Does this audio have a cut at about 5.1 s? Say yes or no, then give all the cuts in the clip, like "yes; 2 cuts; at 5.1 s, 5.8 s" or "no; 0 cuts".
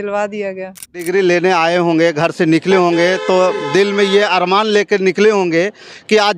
no; 1 cut; at 1.1 s